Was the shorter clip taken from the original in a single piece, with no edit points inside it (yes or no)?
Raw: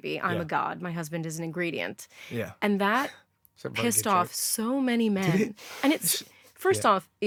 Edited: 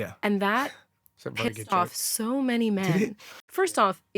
no